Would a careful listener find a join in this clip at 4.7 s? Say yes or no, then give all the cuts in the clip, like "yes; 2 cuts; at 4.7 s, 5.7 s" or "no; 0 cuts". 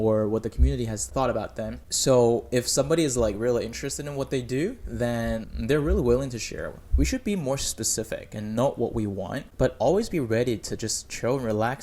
no; 2 cuts; at 1.1 s, 6.9 s